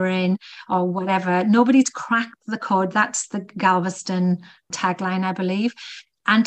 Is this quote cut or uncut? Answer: uncut